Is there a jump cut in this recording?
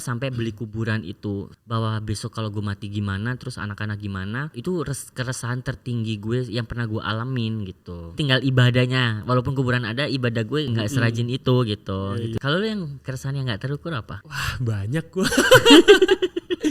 yes; 3 cuts; at 1.6 s, 8.1 s, 12.4 s

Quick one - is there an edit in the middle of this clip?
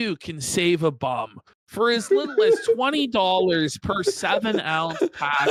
no; 0 cuts

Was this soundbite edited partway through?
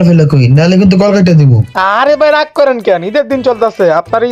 no; 0 cuts

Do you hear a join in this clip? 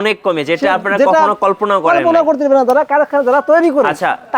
no; 0 cuts

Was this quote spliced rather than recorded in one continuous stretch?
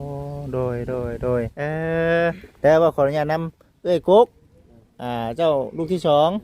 yes; 1 cut; at 1.6 s

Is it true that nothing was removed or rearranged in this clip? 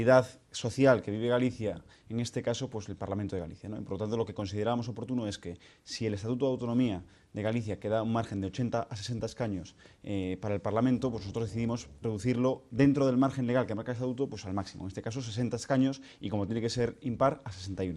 no; 1 cut; at 8.7 s

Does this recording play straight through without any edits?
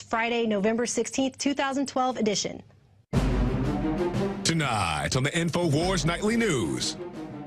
no; 1 cut; at 3.7 s

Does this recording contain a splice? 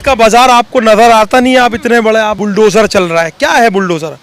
yes; 1 cut; at 2.4 s

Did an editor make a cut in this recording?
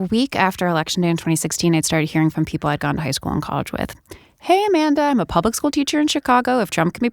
no; 0 cuts

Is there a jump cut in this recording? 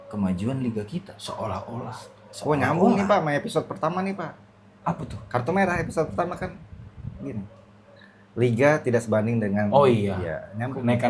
no; 0 cuts

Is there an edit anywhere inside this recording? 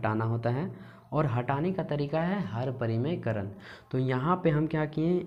no; 0 cuts

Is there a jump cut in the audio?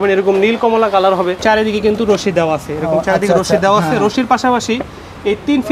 yes; 1 cut; at 1.4 s

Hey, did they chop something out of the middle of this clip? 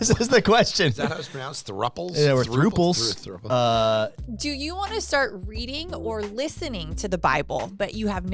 no; 0 cuts

